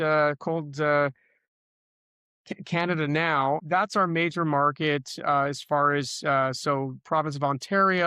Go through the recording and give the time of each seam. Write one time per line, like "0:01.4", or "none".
0:03.6

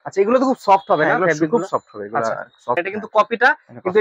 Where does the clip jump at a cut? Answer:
0:02.8

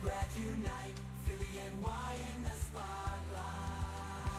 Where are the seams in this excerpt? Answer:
none

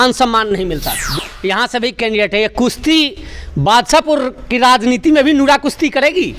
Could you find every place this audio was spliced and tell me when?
0:01.1

